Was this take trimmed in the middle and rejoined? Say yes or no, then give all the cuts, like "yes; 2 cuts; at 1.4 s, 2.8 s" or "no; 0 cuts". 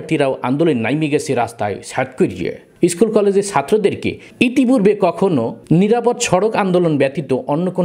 yes; 1 cut; at 2.6 s